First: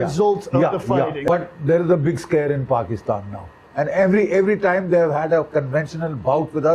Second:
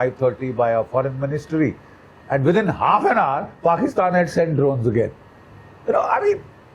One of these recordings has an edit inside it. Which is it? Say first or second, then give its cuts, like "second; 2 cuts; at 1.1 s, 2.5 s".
first; 2 cuts; at 1.2 s, 3.6 s